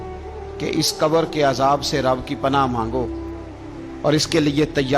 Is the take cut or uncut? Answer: uncut